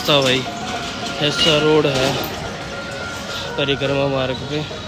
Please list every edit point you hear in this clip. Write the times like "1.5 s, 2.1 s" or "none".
none